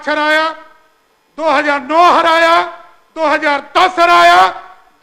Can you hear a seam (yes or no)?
no